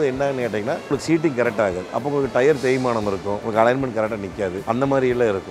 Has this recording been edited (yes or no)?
yes